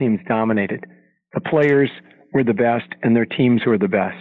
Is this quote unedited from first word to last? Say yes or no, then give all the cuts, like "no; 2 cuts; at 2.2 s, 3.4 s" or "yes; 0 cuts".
yes; 0 cuts